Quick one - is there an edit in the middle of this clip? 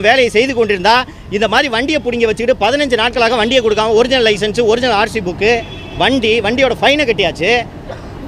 no; 0 cuts

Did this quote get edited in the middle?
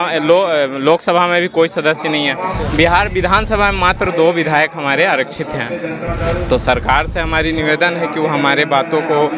no; 0 cuts

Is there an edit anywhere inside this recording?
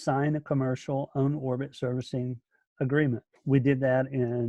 yes; 1 cut; at 3.4 s

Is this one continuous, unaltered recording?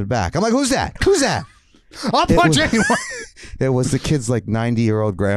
yes; 0 cuts

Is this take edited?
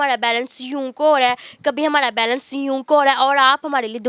no; 0 cuts

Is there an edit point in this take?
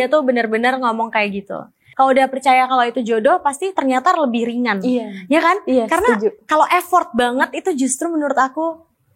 yes; 1 cut; at 1.8 s

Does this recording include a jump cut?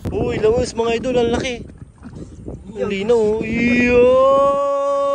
no; 0 cuts

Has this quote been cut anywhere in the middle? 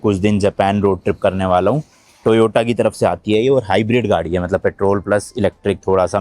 no; 0 cuts

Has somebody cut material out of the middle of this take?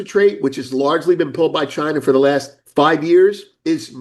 no; 0 cuts

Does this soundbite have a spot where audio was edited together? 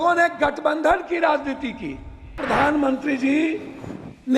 yes; 1 cut; at 2.4 s

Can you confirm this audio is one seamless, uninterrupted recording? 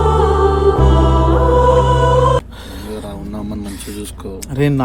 no; 1 cut; at 2.6 s

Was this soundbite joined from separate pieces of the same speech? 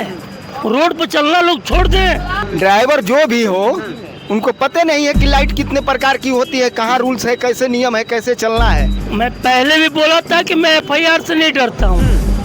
yes; 2 cuts; at 2.3 s, 9.0 s

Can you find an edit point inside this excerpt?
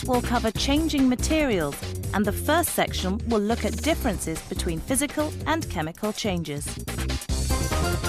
yes; 1 cut; at 4.4 s

